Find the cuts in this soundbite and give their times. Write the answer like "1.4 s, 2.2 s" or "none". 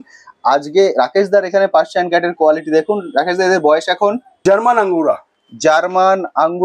4.3 s